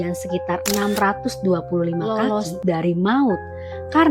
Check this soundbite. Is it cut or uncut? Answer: cut